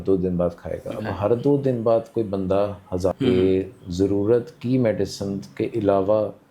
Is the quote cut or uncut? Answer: cut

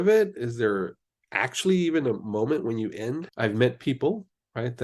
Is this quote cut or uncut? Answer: cut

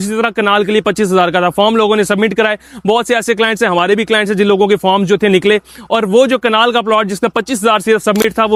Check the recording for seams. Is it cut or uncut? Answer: uncut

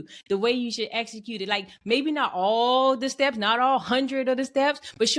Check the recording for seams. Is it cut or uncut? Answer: uncut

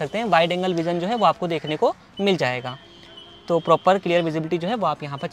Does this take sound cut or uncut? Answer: uncut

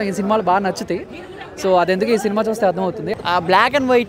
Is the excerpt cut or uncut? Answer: cut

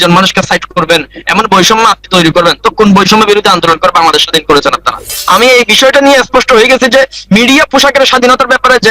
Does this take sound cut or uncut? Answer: cut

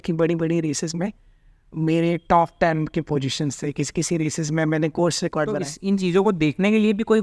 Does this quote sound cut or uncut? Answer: cut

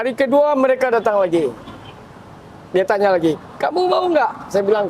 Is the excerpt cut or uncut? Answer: uncut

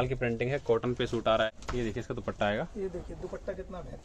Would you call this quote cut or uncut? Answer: cut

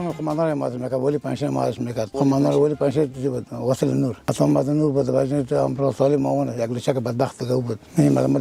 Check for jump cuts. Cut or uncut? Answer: uncut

